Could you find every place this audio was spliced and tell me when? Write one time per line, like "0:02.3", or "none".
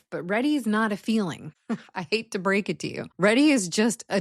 0:01.5
0:03.0